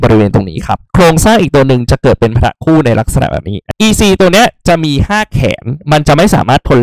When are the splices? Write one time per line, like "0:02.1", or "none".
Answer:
0:00.8
0:03.6